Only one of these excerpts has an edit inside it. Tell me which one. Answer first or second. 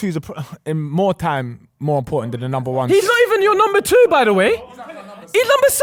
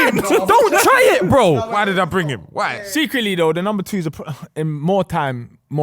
second